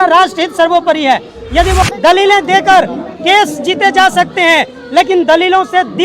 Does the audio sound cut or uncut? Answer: cut